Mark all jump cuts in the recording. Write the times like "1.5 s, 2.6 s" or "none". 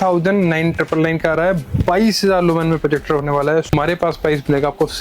3.7 s